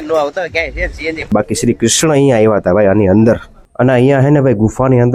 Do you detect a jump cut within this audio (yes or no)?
yes